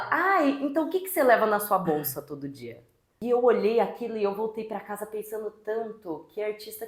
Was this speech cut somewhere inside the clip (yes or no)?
yes